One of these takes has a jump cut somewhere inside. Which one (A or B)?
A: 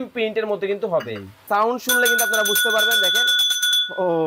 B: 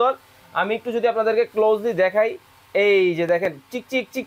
A